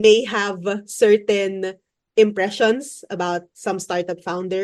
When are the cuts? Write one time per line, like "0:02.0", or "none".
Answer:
none

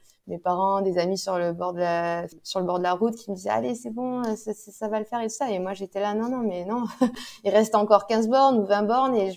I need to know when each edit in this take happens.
0:02.4

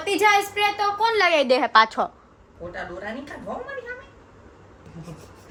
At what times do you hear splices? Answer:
none

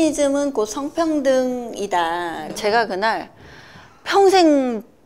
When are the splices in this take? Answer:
0:02.5

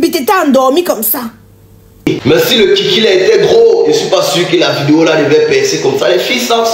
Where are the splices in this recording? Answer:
0:02.1

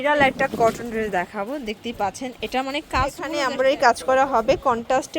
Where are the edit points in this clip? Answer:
0:03.8

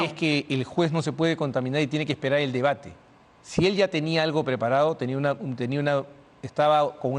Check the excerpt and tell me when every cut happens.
none

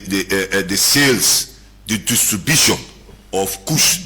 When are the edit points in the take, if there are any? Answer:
0:01.5
0:03.0

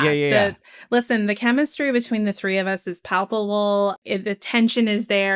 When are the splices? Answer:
0:04.0

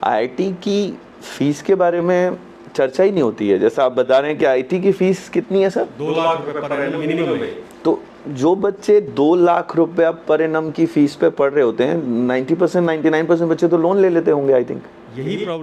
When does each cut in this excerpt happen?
none

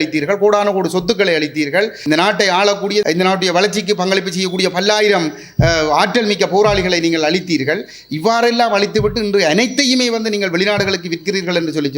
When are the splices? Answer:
0:02.0
0:03.0

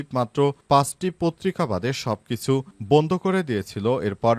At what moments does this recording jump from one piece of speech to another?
none

